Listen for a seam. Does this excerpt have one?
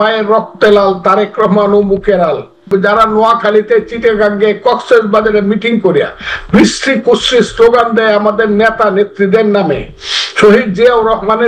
yes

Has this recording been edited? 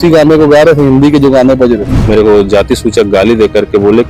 yes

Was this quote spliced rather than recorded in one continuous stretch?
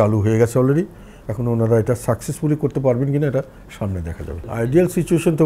no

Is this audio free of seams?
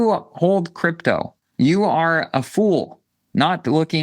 no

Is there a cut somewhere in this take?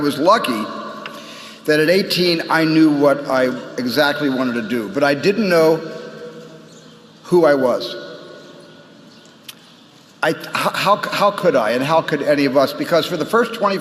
yes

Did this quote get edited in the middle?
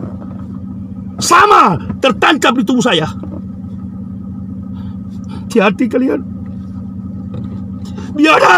no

